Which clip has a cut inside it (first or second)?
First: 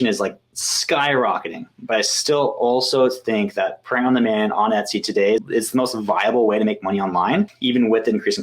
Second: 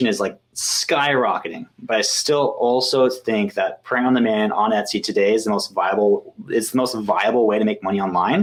first